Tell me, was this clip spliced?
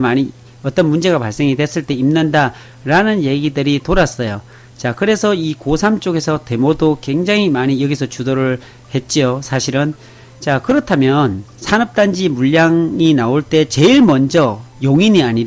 no; 0 cuts

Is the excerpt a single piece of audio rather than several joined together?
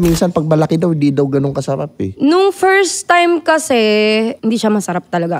no; 1 cut; at 4.4 s

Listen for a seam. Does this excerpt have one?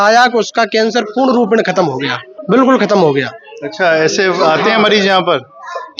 no; 0 cuts

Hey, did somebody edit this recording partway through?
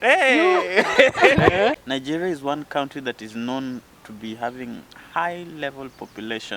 yes; 1 cut; at 1.8 s

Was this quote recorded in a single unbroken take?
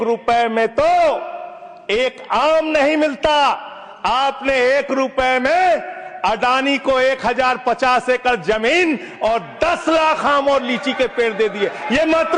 yes; 0 cuts

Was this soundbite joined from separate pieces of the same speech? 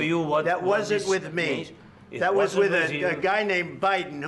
no; 0 cuts

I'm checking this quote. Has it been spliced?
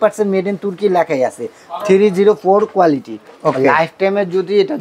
no; 0 cuts

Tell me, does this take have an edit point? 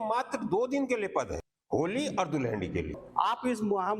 yes; 2 cuts; at 1.5 s, 3.0 s

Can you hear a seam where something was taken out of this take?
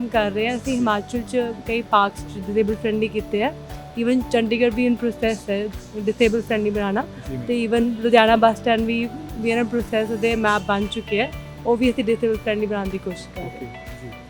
no; 0 cuts

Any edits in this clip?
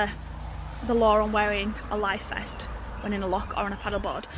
no; 0 cuts

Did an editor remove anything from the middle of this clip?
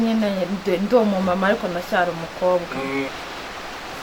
yes; 1 cut; at 3.1 s

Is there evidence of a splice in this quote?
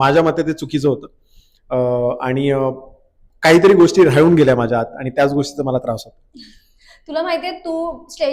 no; 0 cuts

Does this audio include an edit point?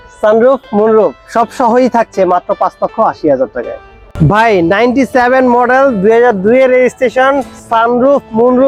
no; 0 cuts

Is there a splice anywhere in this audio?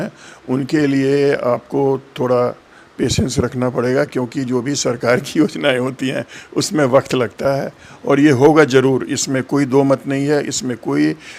no; 0 cuts

